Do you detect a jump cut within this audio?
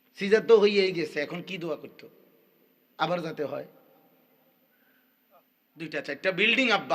yes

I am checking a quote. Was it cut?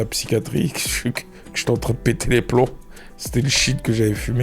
no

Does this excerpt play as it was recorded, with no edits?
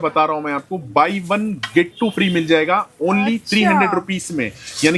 yes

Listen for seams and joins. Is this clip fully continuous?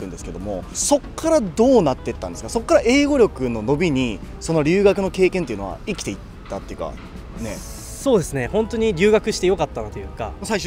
yes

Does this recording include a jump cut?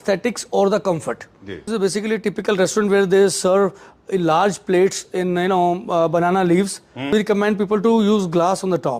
yes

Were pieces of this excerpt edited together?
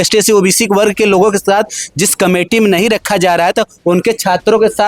no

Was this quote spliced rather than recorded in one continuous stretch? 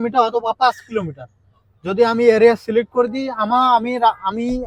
no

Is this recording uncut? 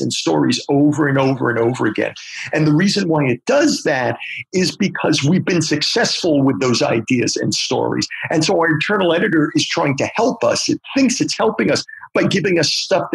yes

